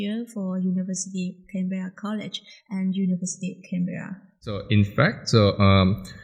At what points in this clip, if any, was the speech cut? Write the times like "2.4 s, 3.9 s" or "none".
4.6 s